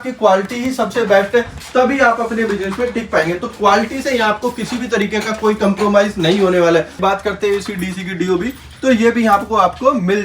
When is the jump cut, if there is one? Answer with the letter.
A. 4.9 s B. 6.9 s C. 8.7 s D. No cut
B